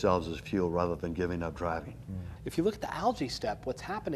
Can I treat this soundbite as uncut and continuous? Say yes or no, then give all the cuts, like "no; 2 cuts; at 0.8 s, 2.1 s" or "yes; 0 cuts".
no; 1 cut; at 2.3 s